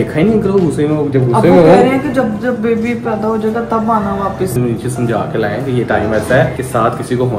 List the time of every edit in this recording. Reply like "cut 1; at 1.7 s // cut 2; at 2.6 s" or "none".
cut 1; at 4.6 s